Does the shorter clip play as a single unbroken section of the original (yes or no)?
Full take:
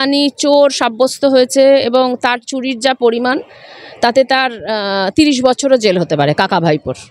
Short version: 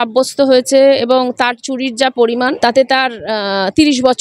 no